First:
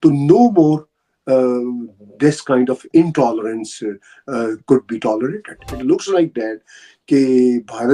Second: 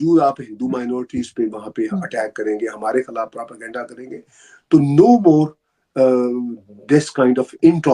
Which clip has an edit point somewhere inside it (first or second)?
first